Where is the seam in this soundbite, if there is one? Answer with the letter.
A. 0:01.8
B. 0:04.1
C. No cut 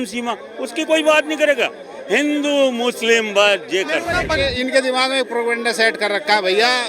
B